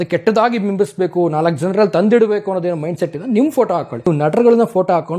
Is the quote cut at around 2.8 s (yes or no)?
no